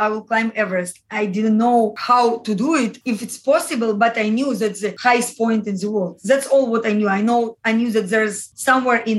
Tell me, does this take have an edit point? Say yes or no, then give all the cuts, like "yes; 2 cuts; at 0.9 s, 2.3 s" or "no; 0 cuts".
no; 0 cuts